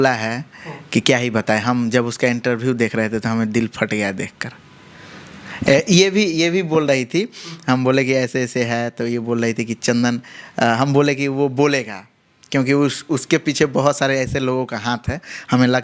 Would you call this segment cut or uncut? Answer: uncut